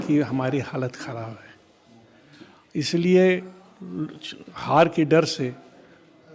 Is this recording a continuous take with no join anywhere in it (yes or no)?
yes